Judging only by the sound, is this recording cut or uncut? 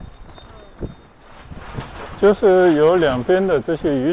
cut